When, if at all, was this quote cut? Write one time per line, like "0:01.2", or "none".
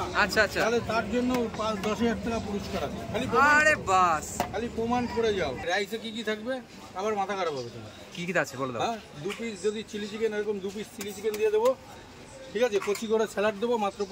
0:05.6